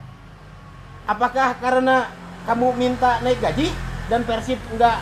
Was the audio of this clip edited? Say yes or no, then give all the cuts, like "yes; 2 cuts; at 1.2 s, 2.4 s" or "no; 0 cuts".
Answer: no; 0 cuts